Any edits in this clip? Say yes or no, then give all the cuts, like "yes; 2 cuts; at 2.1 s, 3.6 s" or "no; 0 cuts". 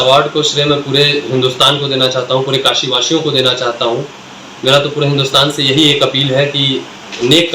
no; 0 cuts